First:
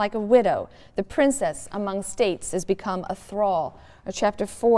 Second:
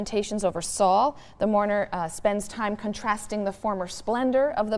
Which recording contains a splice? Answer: second; 1 cut; at 1.7 s

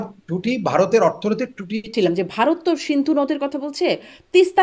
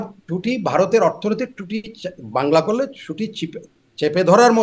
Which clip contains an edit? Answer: first; 1 cut; at 1.9 s

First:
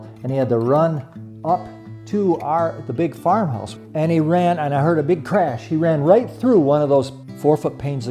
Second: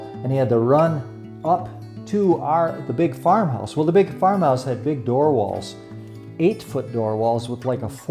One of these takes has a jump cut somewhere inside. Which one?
first; 2 cuts; at 3.6 s, 7.2 s

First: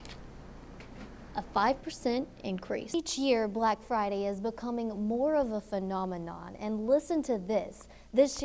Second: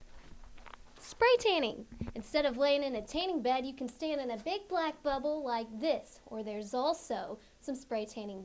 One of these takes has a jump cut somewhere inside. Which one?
first; 1 cut; at 2.9 s

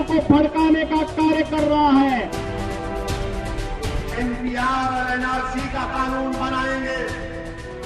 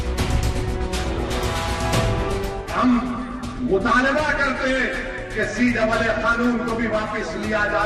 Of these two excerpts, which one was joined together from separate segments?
first; 1 cut; at 2.3 s

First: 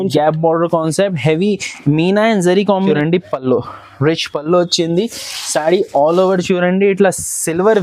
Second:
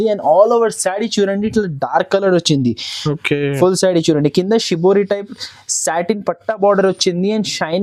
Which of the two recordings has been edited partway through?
first; 1 cut; at 2.9 s

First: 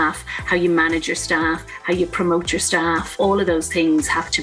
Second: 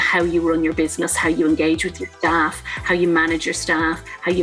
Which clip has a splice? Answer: first; 1 cut; at 3.2 s

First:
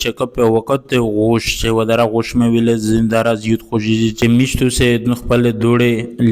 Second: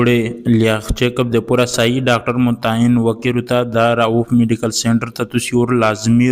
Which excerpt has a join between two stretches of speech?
first; 1 cut; at 4.2 s

